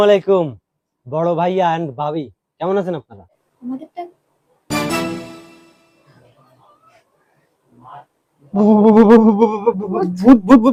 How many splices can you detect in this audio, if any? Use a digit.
0